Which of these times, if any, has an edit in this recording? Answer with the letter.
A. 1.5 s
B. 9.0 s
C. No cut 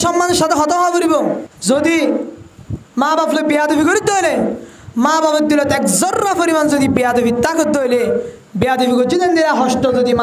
A